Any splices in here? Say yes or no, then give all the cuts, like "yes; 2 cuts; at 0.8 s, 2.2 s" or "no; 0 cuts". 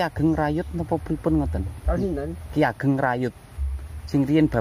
no; 0 cuts